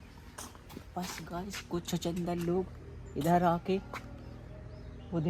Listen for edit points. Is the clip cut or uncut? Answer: uncut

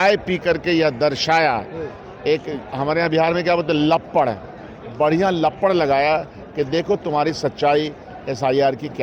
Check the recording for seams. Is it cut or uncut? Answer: uncut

